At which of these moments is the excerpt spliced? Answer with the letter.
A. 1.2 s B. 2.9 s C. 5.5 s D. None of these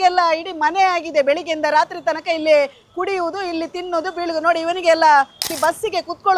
C